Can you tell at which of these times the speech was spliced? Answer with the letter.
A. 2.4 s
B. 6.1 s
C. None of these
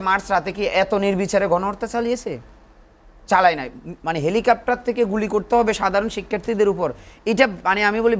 C